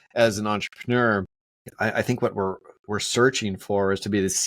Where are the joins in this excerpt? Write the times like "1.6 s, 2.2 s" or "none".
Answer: 1.7 s

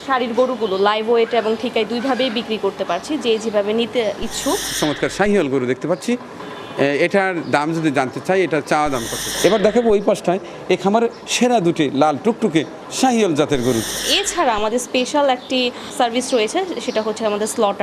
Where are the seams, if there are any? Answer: 4.7 s, 9.2 s, 14.1 s, 15.9 s

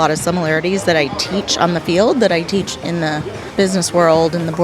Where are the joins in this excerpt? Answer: 3.4 s

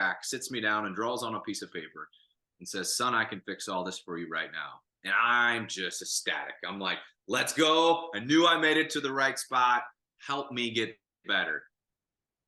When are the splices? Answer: none

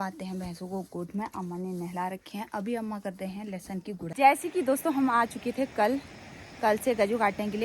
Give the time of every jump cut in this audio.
4.1 s

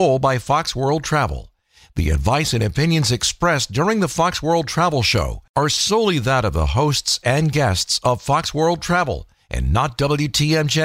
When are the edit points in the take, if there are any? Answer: none

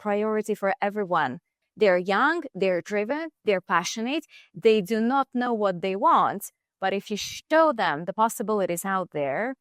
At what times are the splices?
1.6 s

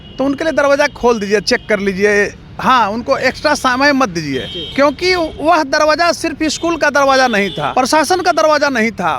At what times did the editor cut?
4.6 s, 7.6 s

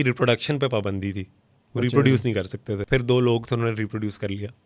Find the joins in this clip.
2.7 s

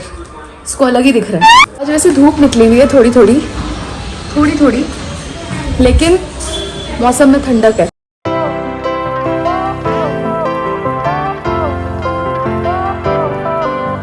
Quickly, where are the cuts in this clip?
none

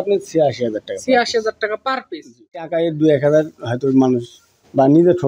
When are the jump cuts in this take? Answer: 2.7 s

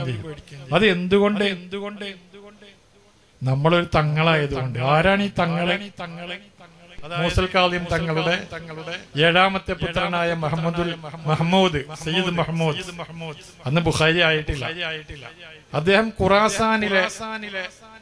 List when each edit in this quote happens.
7.0 s

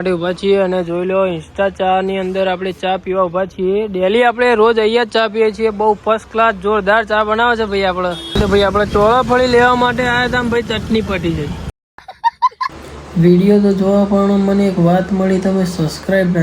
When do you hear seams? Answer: 8.4 s, 12.8 s

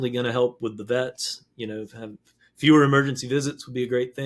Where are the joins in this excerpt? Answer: none

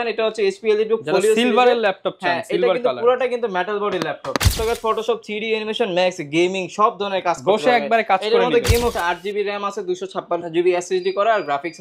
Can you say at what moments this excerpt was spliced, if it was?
4.6 s, 8.9 s

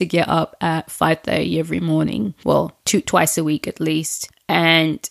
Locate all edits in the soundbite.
2.7 s

